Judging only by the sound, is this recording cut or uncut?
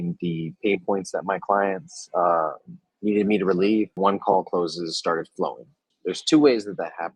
cut